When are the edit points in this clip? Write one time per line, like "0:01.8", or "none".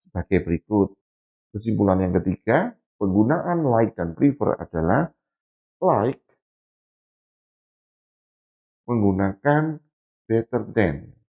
0:01.0